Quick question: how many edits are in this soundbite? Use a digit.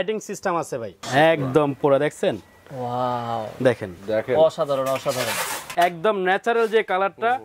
2